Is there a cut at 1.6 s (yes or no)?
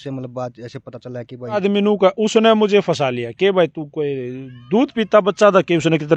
yes